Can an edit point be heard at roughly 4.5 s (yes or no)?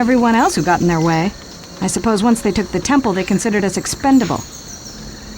yes